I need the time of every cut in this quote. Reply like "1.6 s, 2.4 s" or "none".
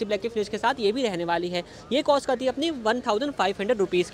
none